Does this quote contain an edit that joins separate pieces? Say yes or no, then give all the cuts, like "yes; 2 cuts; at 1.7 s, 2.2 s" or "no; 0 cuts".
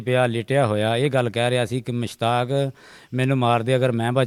no; 0 cuts